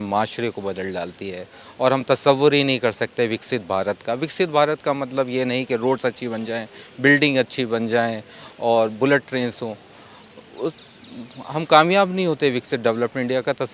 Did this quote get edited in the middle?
no; 0 cuts

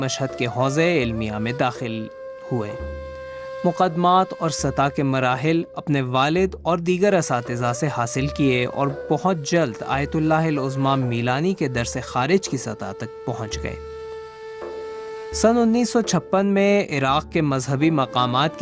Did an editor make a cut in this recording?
yes; 1 cut; at 6.6 s

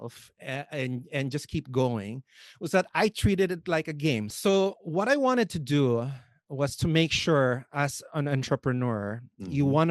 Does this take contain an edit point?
yes; 1 cut; at 4.3 s

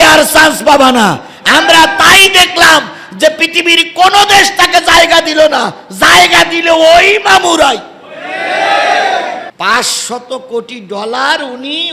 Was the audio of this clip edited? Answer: yes; 1 cut; at 9.5 s

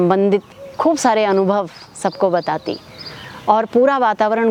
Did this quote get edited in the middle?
no; 0 cuts

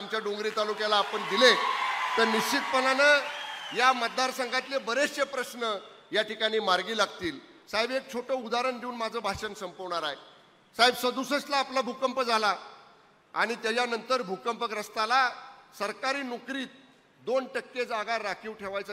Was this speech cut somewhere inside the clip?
no; 0 cuts

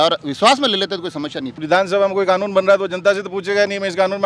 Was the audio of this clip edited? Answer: yes; 1 cut; at 1.6 s

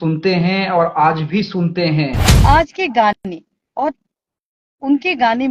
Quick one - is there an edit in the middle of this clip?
yes; 1 cut; at 2.2 s

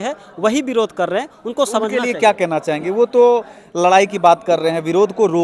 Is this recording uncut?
yes; 0 cuts

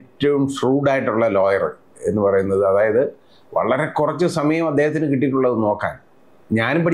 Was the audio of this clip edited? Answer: no; 0 cuts

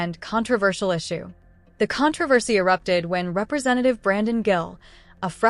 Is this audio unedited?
no; 1 cut; at 2.9 s

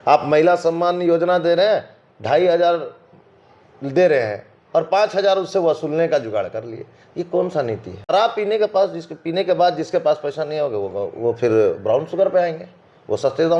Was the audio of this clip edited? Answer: yes; 1 cut; at 7.9 s

